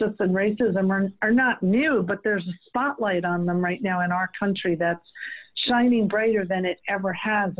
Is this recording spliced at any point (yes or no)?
no